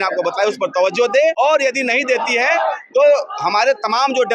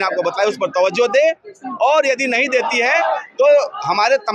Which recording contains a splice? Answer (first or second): first